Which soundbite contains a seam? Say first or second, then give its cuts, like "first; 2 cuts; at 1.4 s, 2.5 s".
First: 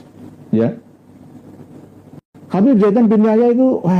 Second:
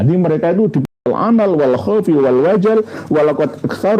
second; 1 cut; at 1.0 s